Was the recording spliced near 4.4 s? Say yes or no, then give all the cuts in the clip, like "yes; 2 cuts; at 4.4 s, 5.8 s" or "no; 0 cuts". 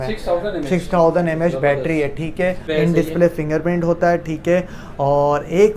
no; 1 cut; at 2.7 s